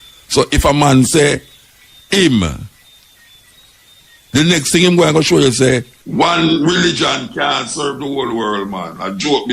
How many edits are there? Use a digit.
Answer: 1